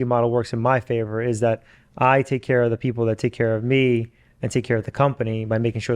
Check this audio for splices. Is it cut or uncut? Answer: uncut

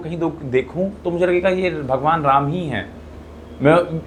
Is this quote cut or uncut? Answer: uncut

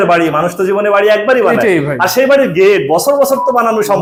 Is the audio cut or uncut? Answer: uncut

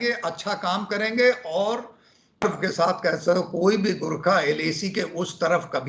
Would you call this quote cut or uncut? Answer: cut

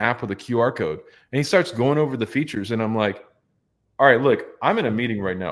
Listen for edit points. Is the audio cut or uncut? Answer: uncut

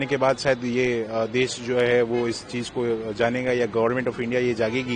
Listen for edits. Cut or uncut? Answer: uncut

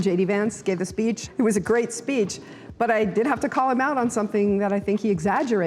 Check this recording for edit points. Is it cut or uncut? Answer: cut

